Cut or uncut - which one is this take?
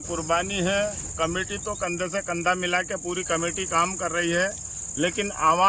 uncut